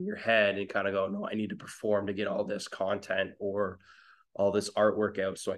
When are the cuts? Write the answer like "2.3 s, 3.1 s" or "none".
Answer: none